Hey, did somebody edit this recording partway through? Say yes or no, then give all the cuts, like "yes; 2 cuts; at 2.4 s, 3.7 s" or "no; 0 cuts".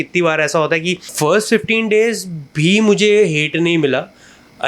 yes; 1 cut; at 1.0 s